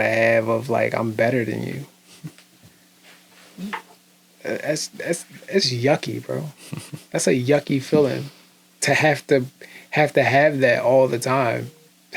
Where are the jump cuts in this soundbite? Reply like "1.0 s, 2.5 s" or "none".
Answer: none